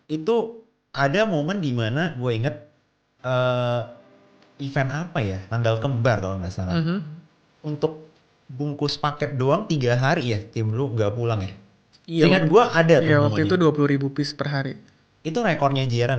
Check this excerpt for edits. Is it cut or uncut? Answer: uncut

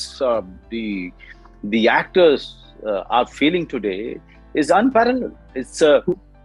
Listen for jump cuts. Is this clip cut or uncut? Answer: uncut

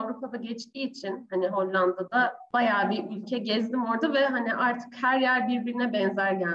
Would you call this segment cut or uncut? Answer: cut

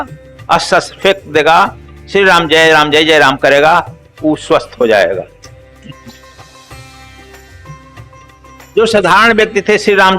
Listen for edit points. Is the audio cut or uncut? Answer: cut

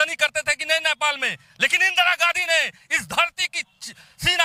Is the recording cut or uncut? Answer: uncut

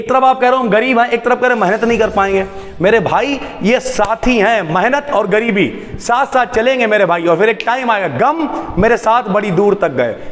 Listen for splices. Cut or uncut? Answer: uncut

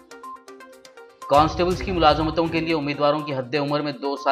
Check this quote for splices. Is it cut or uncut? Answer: cut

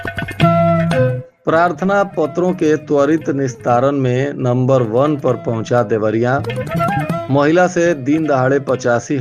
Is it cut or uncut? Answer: cut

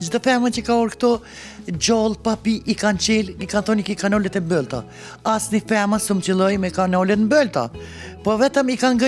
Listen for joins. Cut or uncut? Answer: uncut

